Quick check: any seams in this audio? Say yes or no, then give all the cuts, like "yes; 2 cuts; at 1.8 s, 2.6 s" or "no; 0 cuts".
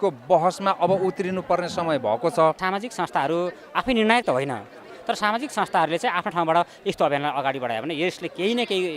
yes; 1 cut; at 2.6 s